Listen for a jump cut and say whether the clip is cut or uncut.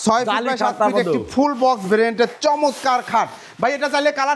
uncut